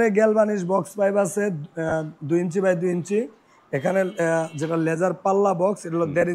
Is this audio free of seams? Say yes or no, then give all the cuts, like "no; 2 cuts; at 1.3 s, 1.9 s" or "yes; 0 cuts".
yes; 0 cuts